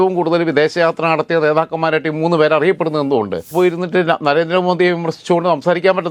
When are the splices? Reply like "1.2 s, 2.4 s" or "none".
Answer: 3.5 s